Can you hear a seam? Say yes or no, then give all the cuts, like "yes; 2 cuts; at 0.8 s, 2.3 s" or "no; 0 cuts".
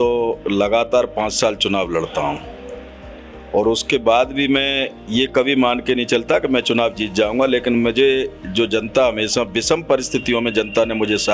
no; 0 cuts